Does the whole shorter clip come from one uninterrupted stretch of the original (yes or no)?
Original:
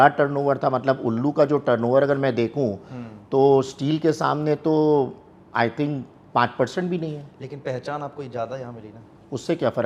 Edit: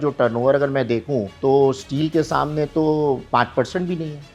no